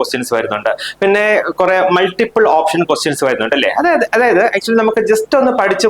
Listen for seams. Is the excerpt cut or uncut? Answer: uncut